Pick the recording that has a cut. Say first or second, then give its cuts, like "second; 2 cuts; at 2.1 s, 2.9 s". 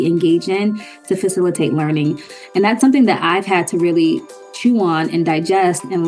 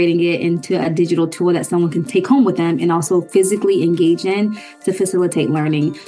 second; 1 cut; at 2.1 s